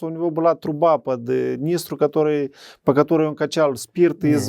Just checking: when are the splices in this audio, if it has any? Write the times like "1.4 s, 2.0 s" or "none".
none